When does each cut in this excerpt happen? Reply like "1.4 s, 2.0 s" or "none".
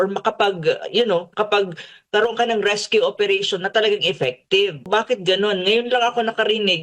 4.9 s